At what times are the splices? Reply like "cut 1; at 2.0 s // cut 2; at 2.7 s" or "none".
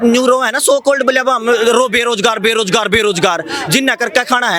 none